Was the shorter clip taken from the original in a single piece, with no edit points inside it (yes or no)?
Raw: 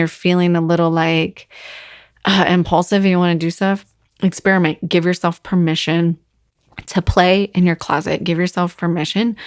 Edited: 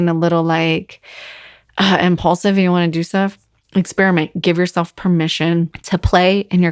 no